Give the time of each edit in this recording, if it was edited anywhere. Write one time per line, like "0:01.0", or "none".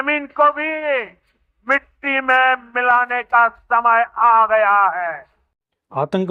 none

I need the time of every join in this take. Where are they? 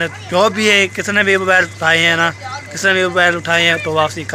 none

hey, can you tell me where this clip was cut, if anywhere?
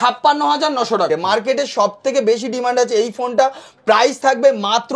0:01.1

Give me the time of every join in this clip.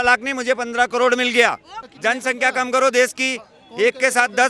0:01.7

